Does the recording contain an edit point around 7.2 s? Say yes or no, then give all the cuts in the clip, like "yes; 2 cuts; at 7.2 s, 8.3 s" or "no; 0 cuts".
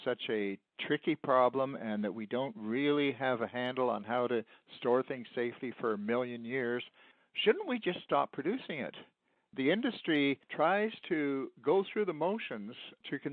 no; 2 cuts; at 9.4 s, 10.5 s